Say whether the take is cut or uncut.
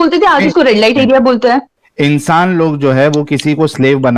cut